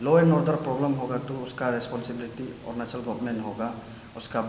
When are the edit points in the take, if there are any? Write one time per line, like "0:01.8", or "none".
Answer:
none